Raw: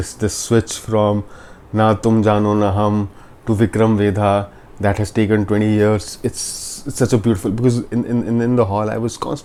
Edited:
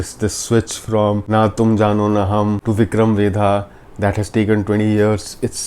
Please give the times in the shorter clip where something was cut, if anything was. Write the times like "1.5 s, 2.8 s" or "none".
1.2 s, 2.6 s